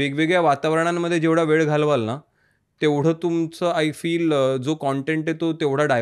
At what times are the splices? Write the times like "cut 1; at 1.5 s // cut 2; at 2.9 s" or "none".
none